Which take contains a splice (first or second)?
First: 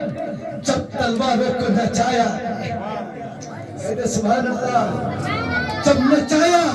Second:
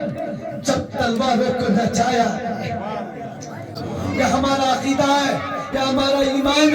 second